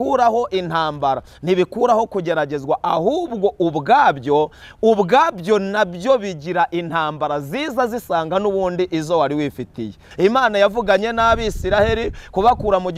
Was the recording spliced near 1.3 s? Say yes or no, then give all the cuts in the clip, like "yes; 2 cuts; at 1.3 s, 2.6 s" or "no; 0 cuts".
no; 1 cut; at 10.0 s